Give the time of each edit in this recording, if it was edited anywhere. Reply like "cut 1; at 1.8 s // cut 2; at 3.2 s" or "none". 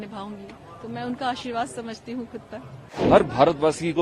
cut 1; at 3.0 s